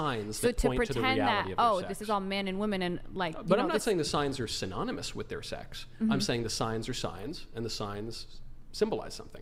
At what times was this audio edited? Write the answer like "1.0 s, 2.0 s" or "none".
none